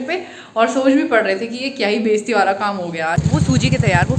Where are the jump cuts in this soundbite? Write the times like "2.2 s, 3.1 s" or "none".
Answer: 3.2 s